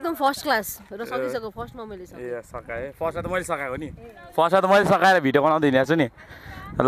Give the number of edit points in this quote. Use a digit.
0